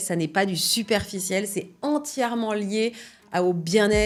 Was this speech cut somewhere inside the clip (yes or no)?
no